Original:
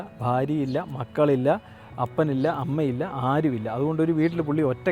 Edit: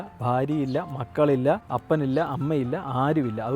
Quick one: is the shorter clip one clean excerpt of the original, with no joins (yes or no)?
no